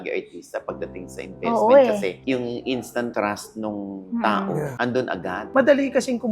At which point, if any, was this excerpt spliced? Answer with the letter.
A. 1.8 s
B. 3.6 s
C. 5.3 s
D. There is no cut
C